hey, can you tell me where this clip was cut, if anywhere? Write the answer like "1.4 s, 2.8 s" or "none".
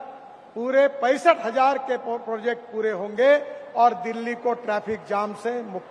none